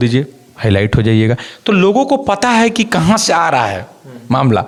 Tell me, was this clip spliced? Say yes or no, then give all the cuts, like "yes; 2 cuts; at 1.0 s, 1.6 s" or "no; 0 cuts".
no; 0 cuts